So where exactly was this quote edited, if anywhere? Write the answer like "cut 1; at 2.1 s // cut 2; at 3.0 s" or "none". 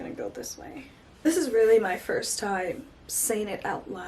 cut 1; at 1.3 s